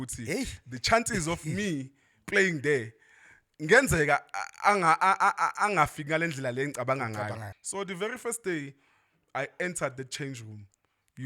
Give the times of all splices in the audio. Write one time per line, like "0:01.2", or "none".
0:07.5